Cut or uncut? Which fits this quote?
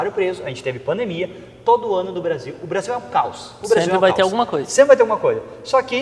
uncut